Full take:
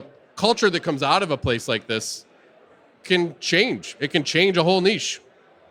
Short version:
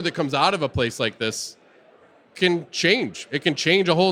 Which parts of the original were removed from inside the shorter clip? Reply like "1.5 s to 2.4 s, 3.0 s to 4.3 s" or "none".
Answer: none